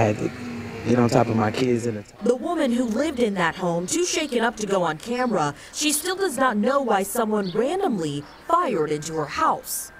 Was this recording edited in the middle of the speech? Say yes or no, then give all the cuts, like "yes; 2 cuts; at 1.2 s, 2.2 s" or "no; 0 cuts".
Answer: yes; 1 cut; at 2.8 s